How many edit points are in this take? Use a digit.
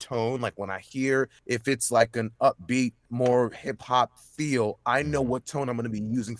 2